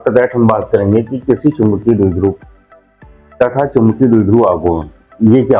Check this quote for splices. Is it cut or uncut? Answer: uncut